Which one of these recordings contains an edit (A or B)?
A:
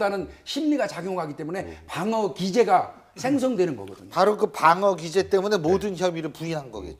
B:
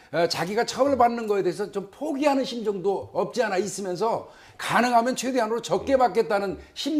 A